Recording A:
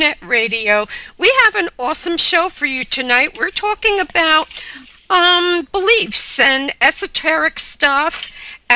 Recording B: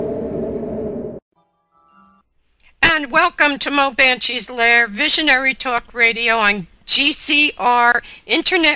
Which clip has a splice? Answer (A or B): B